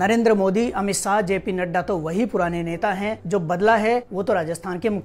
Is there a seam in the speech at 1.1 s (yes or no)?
no